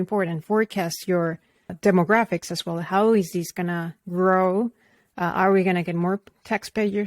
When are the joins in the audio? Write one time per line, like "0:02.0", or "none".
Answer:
0:01.7